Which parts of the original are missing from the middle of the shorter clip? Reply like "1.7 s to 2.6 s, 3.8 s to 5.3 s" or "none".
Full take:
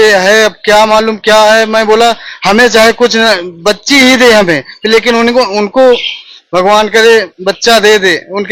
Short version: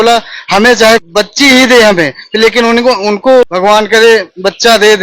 3.0 s to 3.5 s, 6.0 s to 6.5 s